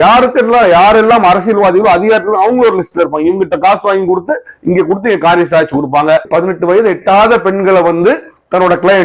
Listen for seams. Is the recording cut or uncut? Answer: cut